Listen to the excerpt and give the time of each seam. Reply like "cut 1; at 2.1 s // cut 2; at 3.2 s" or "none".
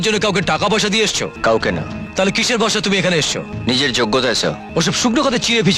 cut 1; at 1.4 s // cut 2; at 2.0 s // cut 3; at 3.5 s // cut 4; at 4.6 s